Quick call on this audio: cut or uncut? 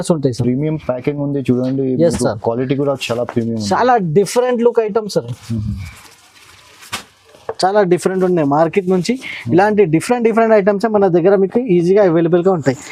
uncut